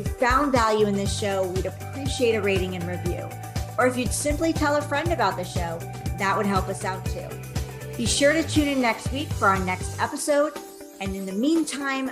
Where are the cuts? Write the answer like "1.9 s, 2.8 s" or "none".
none